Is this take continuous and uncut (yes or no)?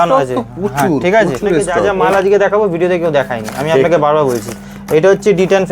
no